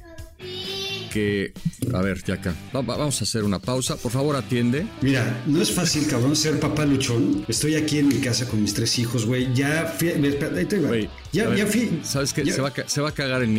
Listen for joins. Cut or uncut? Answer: cut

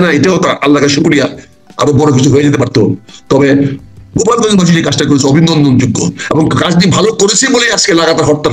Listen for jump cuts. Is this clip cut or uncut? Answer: uncut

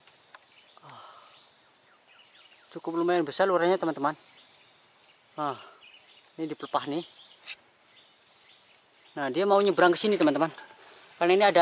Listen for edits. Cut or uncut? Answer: uncut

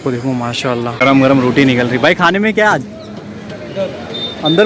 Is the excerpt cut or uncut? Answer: cut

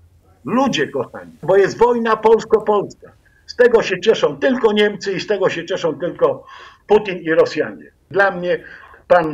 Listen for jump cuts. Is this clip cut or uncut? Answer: cut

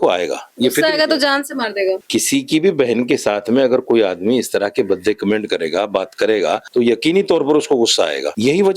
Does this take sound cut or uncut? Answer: cut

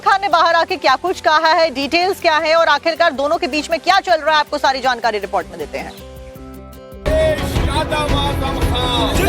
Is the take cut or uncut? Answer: cut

